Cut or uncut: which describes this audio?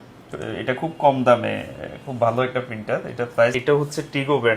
cut